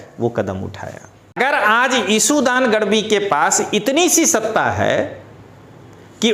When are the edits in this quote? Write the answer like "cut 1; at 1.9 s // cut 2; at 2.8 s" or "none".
cut 1; at 1.4 s